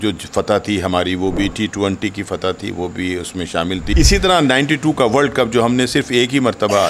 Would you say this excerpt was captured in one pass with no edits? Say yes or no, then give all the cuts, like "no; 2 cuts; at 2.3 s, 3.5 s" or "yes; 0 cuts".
no; 1 cut; at 3.9 s